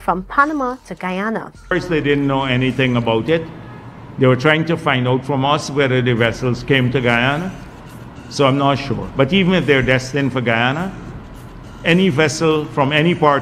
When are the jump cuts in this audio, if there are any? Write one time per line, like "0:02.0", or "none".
0:01.7